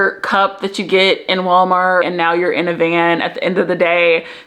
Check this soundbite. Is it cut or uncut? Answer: cut